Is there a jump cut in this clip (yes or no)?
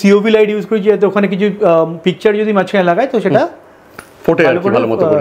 no